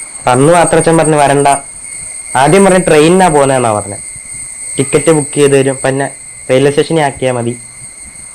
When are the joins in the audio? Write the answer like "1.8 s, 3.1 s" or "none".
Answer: none

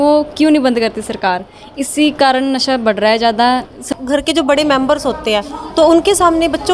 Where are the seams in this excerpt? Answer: 3.9 s

